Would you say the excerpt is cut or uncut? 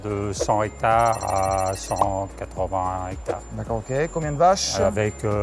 uncut